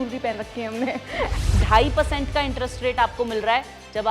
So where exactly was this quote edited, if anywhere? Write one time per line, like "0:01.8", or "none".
0:01.3